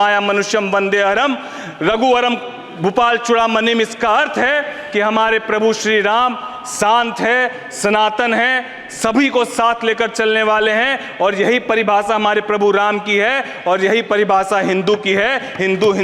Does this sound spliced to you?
no; 0 cuts

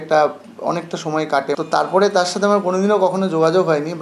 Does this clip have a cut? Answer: yes; 1 cut; at 1.6 s

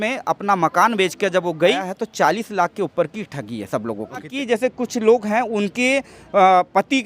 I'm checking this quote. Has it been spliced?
yes; 2 cuts; at 1.9 s, 4.3 s

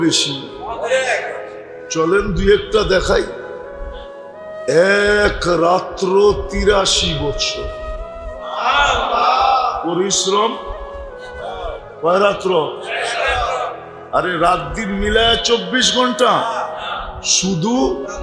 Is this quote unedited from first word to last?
yes; 0 cuts

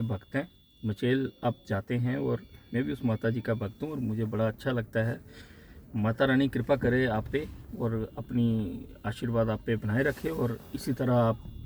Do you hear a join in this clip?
no; 0 cuts

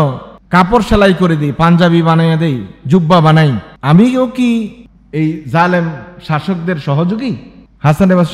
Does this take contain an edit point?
no; 0 cuts

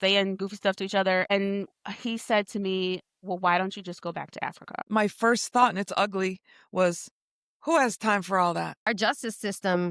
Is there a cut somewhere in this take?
yes; 2 cuts; at 4.7 s, 8.9 s

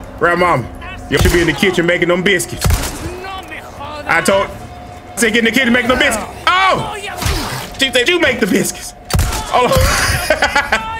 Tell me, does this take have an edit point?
yes; 3 cuts; at 1.2 s, 5.2 s, 8.1 s

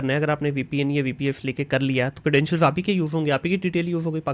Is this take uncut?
yes; 0 cuts

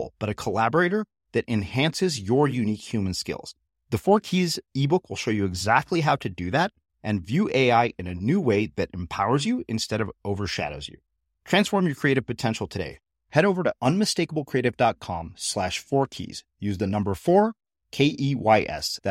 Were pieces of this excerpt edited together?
no; 0 cuts

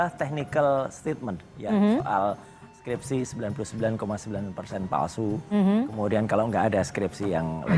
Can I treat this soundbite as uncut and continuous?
yes; 0 cuts

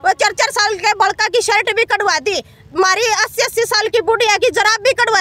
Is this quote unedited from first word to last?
yes; 0 cuts

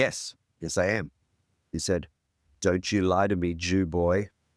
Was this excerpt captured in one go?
no; 1 cut; at 1.6 s

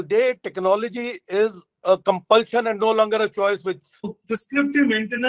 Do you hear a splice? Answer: yes; 1 cut; at 4.2 s

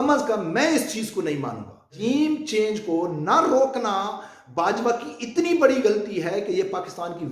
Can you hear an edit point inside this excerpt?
yes; 1 cut; at 1.9 s

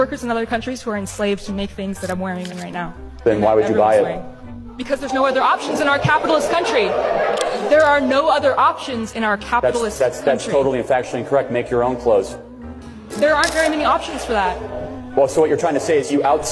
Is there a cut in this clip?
no; 0 cuts

